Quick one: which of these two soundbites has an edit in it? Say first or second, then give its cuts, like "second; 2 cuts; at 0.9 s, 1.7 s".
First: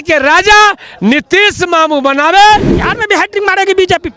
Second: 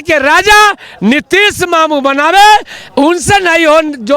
first; 1 cut; at 2.8 s